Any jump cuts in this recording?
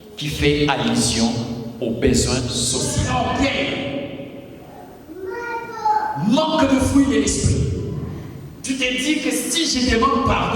yes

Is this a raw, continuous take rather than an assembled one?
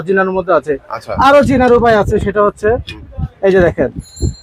yes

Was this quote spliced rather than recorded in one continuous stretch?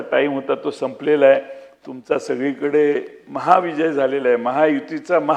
no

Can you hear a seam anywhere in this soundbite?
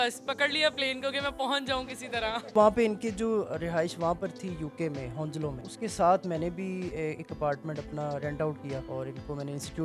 yes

